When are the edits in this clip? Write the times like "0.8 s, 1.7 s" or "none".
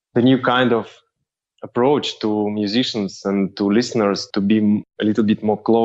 none